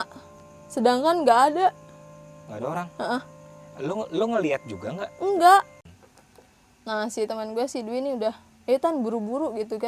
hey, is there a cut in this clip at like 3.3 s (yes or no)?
no